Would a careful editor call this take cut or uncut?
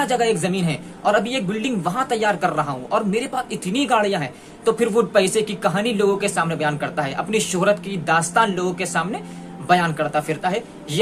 uncut